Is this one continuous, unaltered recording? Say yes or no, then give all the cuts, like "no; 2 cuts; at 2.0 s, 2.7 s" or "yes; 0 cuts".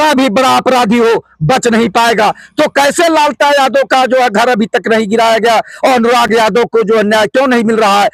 yes; 0 cuts